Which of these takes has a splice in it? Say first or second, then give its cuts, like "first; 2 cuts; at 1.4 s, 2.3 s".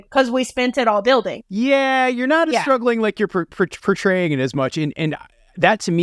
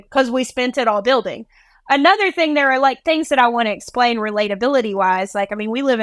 first; 1 cut; at 1.4 s